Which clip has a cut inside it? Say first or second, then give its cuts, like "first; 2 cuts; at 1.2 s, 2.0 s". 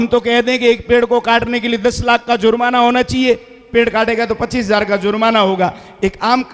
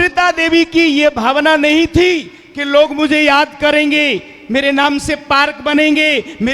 first; 1 cut; at 3.5 s